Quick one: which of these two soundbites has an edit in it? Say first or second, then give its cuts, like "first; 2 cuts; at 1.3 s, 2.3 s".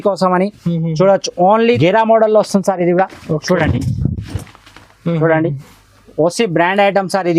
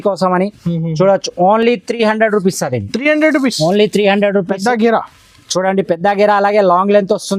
first; 1 cut; at 1.7 s